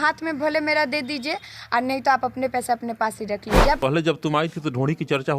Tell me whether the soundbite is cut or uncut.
cut